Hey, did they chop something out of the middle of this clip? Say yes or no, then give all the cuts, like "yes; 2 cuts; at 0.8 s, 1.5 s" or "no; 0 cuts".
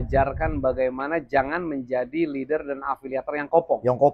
no; 0 cuts